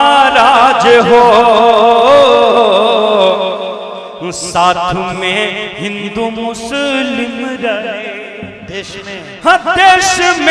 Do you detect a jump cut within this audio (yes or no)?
no